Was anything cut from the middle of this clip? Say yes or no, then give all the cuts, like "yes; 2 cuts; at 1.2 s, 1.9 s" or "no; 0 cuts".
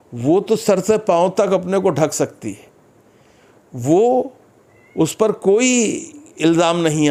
no; 0 cuts